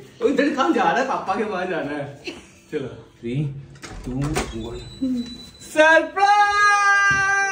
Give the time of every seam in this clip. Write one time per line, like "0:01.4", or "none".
none